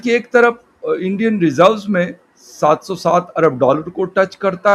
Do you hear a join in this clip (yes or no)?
no